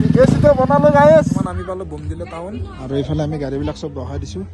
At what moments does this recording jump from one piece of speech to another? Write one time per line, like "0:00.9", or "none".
0:01.4

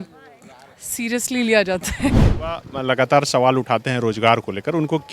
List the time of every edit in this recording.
0:02.3

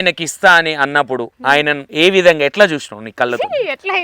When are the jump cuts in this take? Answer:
0:01.8
0:02.5

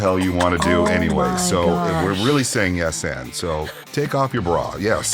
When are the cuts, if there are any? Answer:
0:03.8

